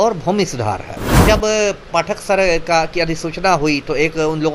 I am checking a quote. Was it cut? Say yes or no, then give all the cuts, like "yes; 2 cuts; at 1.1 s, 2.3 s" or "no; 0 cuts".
yes; 1 cut; at 1.2 s